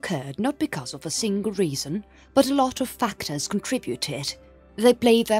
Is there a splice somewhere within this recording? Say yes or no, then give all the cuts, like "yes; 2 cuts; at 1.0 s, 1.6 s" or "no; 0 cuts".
no; 0 cuts